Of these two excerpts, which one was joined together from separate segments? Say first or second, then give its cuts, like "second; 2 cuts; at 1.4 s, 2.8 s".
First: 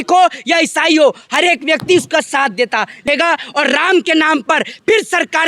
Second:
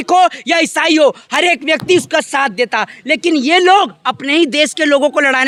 first; 1 cut; at 3.0 s